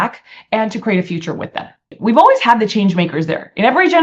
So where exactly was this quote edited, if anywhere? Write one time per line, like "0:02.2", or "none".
0:01.8